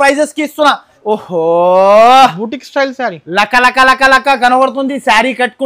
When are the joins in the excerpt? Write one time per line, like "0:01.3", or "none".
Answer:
0:00.9